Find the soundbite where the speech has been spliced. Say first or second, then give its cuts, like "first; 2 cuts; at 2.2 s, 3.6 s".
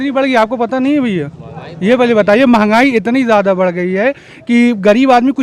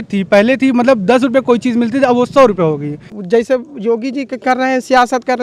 second; 1 cut; at 3.0 s